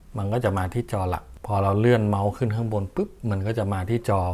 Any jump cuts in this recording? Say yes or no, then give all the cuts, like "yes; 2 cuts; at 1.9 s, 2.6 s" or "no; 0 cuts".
yes; 1 cut; at 1.3 s